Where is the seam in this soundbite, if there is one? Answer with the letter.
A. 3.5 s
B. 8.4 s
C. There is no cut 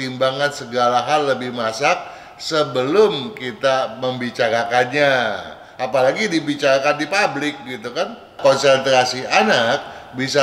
B